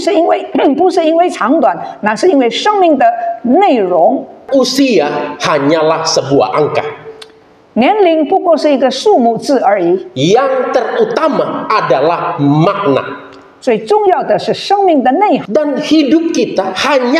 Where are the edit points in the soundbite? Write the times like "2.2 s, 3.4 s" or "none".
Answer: 4.4 s, 15.4 s

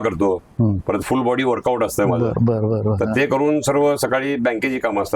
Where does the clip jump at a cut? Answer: none

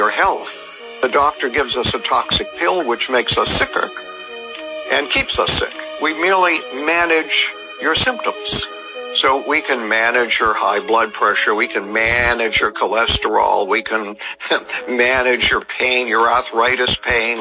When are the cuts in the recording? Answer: none

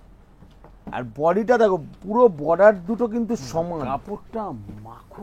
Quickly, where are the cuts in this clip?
3.9 s

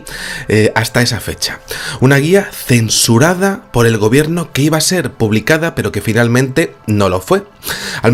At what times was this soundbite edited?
none

